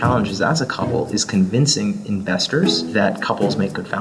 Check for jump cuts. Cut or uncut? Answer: cut